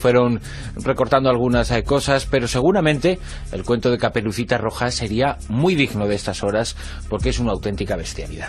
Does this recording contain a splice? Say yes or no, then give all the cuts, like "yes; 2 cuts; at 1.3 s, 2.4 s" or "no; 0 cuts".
yes; 1 cut; at 4.7 s